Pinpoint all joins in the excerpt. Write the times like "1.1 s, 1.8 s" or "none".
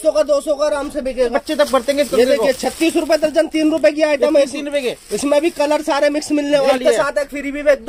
1.3 s, 6.7 s